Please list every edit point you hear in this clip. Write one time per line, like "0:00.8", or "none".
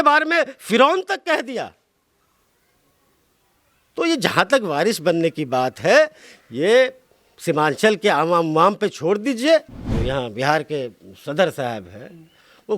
0:09.8